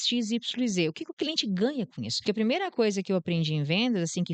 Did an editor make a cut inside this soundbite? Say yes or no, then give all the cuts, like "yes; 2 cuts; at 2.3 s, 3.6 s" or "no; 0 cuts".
yes; 1 cut; at 2.1 s